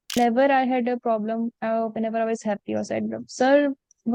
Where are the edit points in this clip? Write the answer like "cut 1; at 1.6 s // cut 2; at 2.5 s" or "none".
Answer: none